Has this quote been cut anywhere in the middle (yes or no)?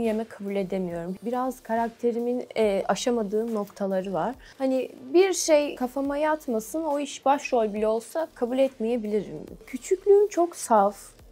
yes